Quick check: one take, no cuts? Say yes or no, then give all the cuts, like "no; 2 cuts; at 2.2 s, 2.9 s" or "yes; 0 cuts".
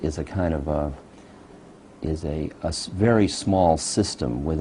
yes; 0 cuts